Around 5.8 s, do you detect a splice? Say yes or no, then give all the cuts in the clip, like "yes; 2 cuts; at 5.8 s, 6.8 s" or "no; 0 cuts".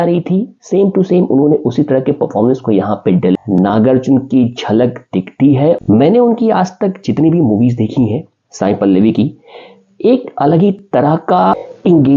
yes; 2 cuts; at 3.4 s, 5.8 s